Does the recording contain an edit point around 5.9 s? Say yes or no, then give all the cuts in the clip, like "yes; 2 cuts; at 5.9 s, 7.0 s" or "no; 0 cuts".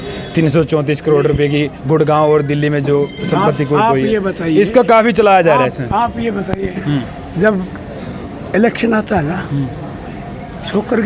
no; 0 cuts